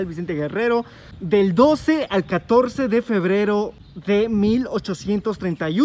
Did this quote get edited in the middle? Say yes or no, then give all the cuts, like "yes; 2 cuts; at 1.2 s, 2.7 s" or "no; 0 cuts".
no; 0 cuts